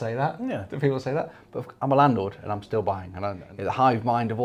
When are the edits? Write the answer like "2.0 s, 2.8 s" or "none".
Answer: 3.5 s